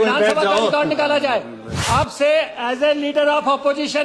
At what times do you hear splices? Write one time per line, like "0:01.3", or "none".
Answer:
0:01.7